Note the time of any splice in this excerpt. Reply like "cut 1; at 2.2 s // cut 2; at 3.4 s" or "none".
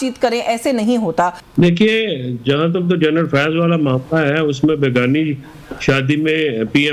cut 1; at 1.4 s